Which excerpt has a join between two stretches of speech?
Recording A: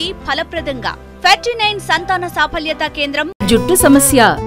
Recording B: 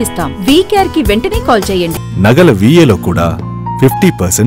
B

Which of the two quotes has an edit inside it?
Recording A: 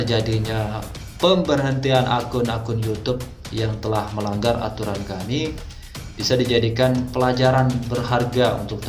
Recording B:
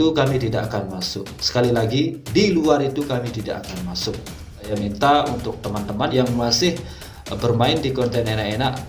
B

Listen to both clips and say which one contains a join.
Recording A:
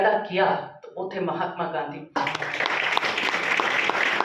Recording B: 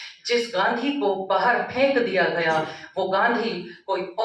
A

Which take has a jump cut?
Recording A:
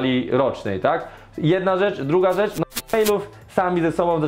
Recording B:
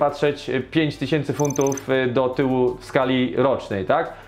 A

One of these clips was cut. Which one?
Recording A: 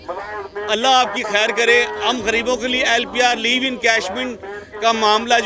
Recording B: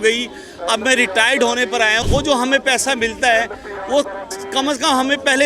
B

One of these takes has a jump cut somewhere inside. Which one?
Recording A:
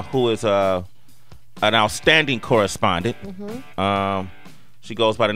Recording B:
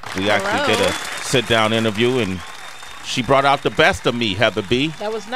A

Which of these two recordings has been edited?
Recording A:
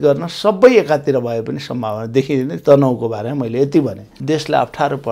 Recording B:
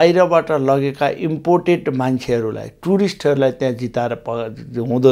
A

